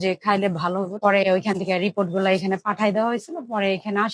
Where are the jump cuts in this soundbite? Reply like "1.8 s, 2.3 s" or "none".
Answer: 1.0 s